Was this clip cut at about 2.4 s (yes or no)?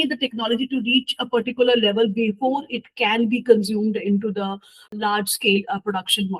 no